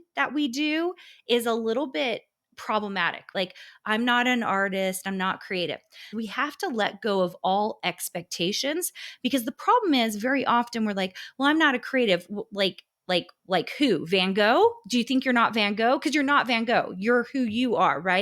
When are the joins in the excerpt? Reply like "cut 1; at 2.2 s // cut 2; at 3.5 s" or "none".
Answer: cut 1; at 3.3 s // cut 2; at 6.1 s